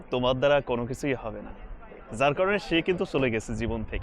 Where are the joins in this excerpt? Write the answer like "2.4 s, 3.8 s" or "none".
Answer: none